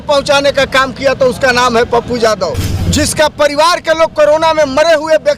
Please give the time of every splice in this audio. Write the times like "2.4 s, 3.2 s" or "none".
2.7 s